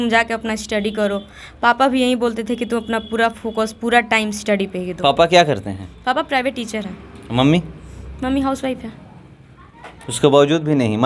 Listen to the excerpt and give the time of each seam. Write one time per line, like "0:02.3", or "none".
none